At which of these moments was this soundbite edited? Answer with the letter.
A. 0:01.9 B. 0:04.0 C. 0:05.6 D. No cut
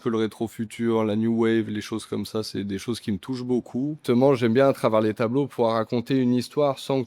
B